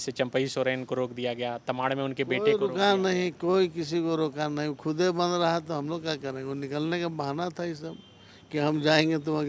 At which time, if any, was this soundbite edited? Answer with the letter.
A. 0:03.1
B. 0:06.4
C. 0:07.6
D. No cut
D